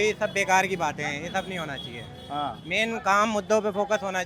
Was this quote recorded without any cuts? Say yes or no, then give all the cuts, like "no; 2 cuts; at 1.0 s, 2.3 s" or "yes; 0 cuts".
yes; 0 cuts